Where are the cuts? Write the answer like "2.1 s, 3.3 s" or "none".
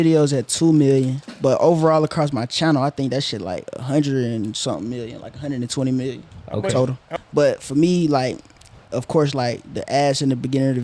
7.1 s